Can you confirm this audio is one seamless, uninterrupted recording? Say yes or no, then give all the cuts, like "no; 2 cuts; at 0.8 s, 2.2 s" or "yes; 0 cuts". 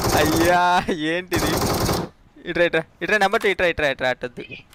yes; 0 cuts